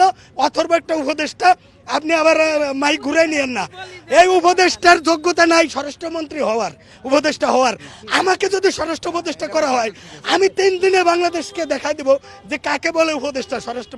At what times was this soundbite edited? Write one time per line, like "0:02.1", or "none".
none